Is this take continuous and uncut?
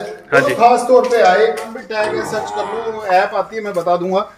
no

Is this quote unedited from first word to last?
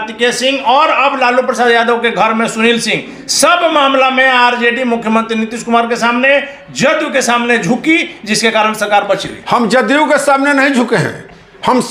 yes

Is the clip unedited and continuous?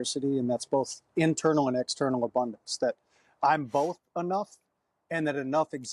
yes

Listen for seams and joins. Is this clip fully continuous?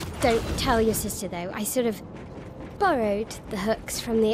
yes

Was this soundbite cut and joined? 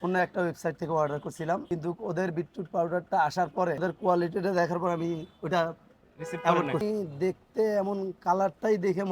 yes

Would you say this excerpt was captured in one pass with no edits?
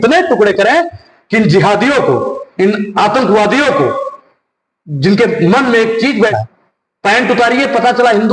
no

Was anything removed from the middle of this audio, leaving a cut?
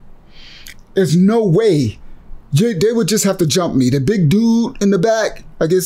no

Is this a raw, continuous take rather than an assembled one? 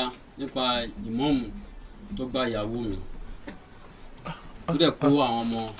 yes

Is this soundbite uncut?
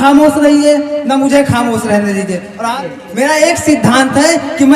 no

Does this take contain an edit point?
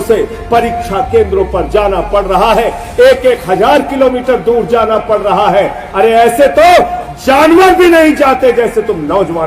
no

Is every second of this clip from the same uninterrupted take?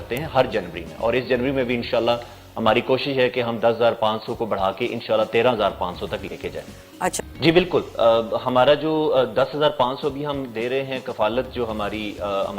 no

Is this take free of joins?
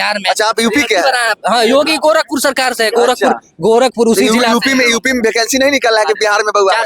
yes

